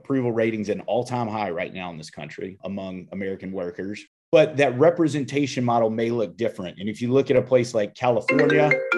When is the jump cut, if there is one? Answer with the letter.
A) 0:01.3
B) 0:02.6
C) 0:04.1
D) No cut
C